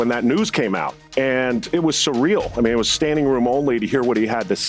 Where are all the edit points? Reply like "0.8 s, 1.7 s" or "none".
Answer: 1.0 s, 1.6 s